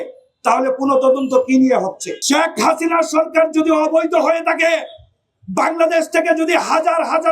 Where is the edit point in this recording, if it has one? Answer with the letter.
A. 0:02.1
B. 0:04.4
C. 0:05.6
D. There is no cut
A